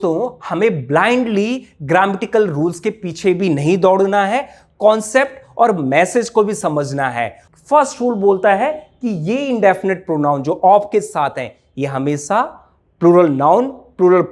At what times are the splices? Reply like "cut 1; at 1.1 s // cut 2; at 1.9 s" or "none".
cut 1; at 7.4 s